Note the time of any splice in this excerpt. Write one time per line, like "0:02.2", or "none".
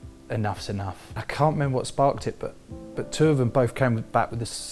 0:01.2

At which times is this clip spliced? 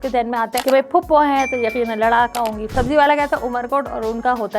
0:02.7

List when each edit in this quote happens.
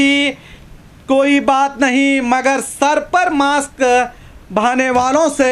none

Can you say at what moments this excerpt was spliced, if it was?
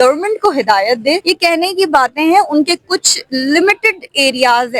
0:01.2

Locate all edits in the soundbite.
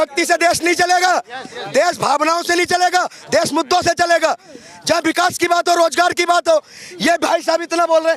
none

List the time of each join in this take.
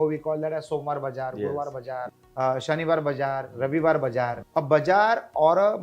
0:02.2
0:04.4

